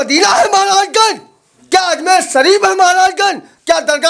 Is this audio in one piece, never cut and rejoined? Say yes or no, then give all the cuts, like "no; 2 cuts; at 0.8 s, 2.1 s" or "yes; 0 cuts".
yes; 0 cuts